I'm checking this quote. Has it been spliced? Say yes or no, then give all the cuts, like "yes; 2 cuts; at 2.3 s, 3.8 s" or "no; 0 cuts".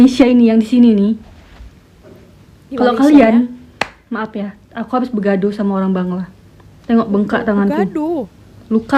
no; 0 cuts